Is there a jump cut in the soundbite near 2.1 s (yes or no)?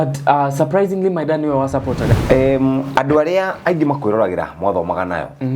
yes